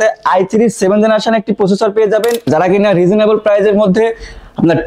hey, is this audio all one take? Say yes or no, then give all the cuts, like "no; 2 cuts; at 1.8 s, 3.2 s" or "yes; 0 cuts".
no; 1 cut; at 2.5 s